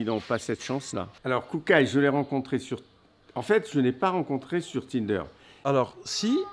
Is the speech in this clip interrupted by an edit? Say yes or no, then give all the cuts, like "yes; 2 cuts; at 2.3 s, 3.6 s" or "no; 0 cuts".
yes; 2 cuts; at 1.1 s, 5.5 s